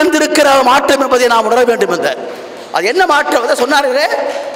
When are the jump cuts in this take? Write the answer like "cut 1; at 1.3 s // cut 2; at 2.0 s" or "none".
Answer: none